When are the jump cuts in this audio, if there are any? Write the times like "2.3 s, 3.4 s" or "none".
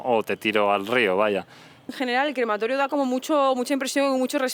1.9 s

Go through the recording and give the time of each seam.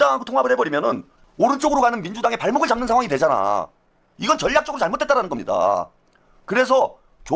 none

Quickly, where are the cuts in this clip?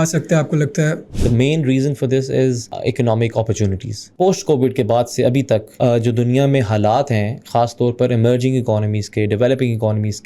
1.1 s, 2.7 s, 4.0 s, 5.7 s

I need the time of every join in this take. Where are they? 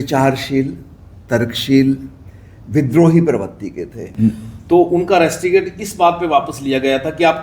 4.0 s

